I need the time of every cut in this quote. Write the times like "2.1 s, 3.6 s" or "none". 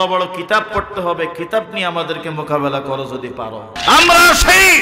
3.7 s